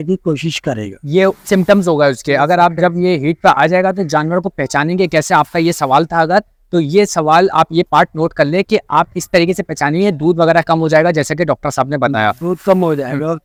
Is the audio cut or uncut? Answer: uncut